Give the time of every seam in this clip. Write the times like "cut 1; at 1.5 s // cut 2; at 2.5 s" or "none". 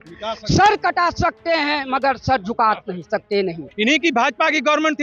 cut 1; at 3.7 s